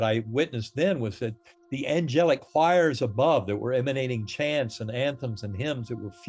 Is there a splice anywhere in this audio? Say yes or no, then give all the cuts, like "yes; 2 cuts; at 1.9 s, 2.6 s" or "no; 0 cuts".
no; 0 cuts